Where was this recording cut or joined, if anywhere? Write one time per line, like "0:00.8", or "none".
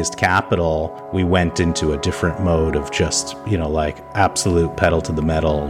none

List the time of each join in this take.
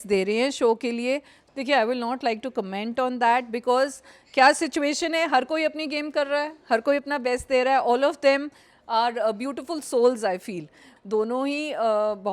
0:01.4
0:10.8

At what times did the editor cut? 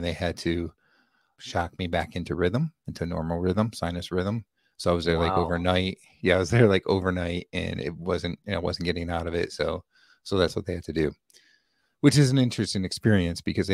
0:01.4

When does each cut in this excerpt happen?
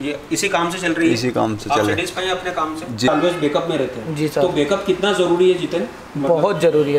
0:03.1

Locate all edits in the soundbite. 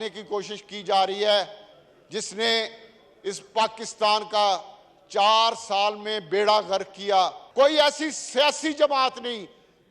0:07.4

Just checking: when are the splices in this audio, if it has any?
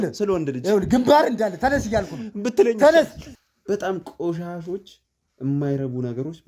0:03.3

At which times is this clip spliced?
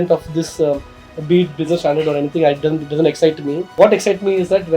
0:03.7

